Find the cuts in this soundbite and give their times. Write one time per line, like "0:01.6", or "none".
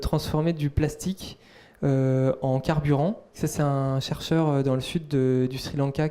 0:03.4